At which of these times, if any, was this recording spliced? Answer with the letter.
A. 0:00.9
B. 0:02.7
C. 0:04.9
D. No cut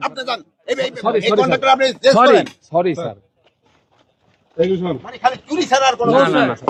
D